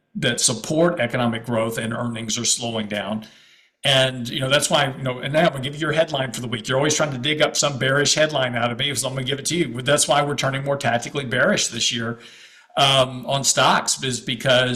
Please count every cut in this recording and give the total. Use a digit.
0